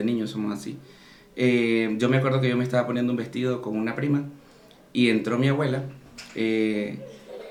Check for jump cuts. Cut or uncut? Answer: uncut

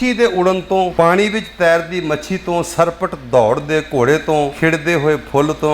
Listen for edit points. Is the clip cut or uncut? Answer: cut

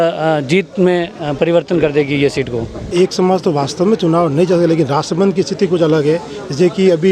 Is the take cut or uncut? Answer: cut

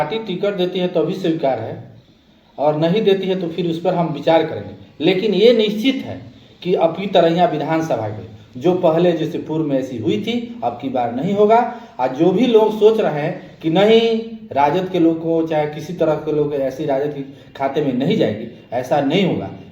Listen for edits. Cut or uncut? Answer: uncut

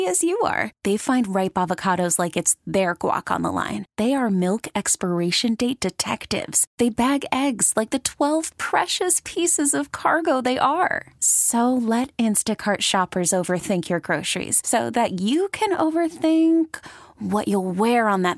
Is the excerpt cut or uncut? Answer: uncut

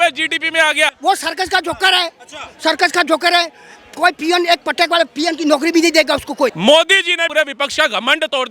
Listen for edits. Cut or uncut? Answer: cut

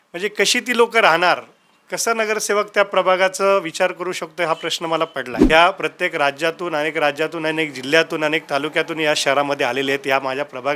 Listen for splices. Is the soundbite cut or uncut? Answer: cut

